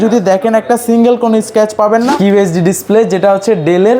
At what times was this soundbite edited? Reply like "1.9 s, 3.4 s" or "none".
2.1 s